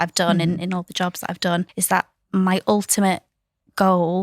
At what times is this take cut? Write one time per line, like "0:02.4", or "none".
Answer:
0:01.8